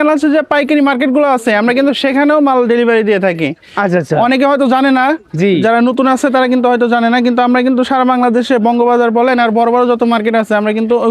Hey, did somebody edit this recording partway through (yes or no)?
no